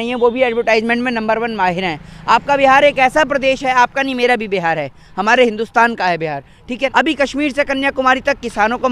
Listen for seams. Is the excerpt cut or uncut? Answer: cut